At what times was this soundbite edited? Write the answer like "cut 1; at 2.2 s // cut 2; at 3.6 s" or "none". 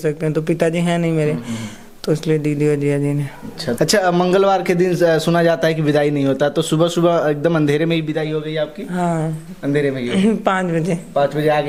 none